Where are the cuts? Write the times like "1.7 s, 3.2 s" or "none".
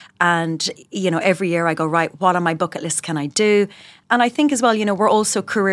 4.0 s